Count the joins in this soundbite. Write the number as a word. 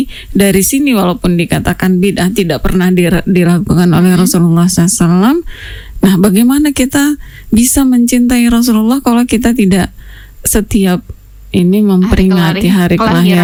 zero